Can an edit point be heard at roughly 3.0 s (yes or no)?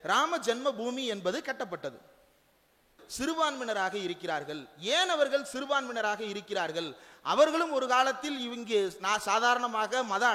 yes